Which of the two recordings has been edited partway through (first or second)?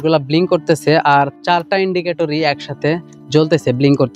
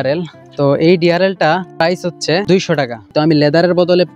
second